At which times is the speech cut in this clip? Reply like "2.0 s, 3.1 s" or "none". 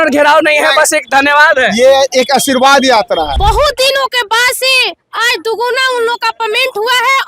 3.3 s